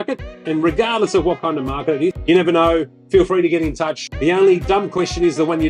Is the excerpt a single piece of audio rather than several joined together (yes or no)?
no